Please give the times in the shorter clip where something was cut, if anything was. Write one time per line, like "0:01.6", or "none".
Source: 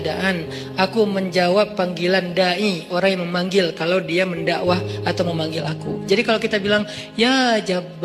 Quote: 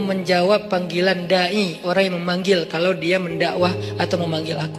none